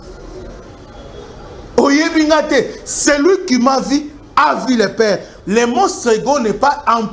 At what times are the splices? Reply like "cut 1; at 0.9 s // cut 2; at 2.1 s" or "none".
cut 1; at 5.3 s